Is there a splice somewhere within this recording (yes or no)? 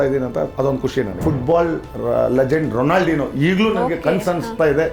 yes